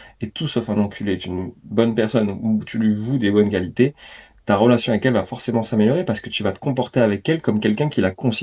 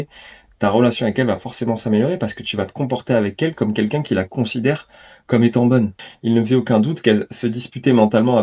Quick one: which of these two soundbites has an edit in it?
second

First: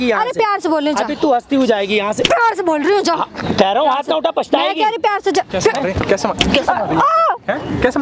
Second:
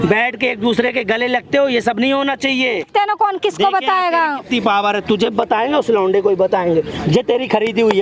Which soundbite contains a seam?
second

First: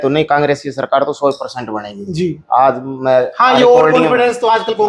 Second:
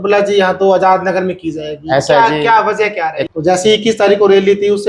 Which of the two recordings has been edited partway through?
second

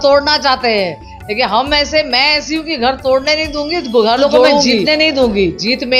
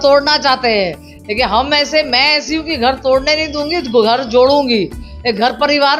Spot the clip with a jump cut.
first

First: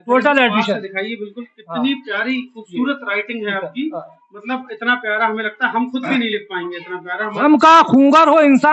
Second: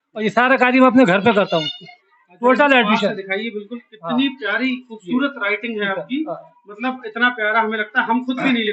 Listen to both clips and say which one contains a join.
first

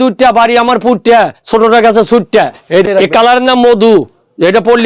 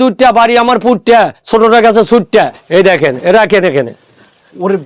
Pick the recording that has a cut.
first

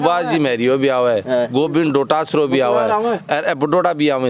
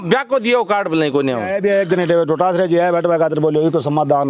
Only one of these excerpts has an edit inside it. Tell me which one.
second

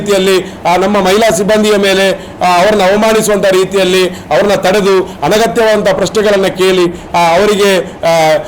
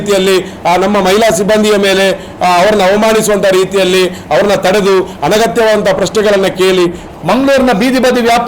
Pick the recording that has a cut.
second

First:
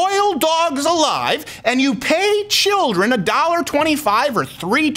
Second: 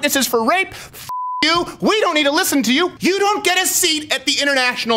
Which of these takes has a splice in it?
second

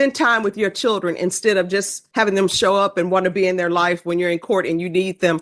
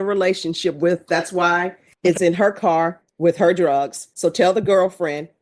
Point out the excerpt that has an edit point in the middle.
second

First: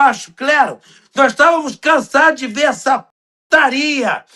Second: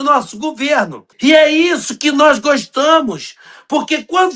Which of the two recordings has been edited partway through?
second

